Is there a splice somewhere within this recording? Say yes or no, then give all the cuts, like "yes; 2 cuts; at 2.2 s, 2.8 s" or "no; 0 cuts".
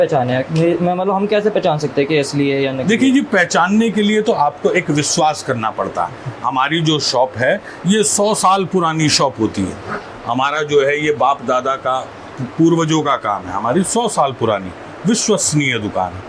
no; 0 cuts